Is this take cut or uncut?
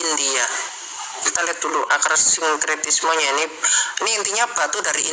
cut